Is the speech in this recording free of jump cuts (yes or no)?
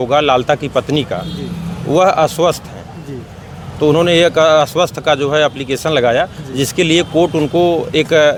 yes